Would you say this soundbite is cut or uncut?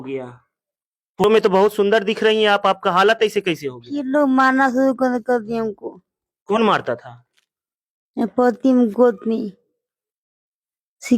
cut